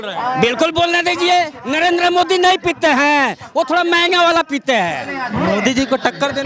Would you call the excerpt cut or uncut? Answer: cut